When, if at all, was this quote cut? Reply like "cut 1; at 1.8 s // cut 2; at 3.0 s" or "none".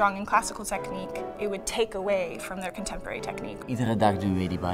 cut 1; at 3.7 s